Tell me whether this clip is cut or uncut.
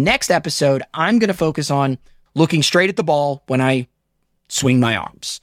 cut